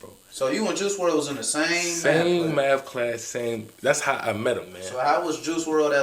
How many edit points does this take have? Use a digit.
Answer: 1